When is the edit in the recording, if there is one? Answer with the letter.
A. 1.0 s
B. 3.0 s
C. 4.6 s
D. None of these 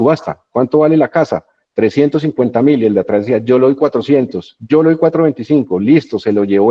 D